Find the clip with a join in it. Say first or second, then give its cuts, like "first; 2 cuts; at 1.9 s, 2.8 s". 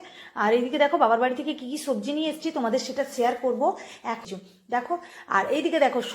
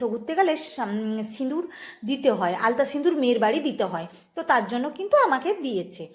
first; 1 cut; at 4.2 s